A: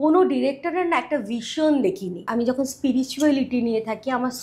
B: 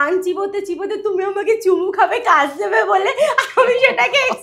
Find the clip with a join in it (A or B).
A